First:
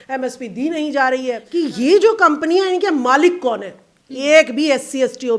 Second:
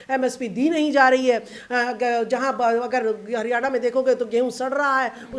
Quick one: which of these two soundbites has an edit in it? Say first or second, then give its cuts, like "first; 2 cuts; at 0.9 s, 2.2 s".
first; 1 cut; at 1.4 s